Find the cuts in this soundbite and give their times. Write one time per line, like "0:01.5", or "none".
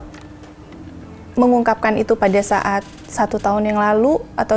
none